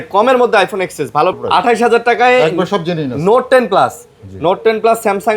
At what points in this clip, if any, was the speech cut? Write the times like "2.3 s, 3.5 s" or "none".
1.4 s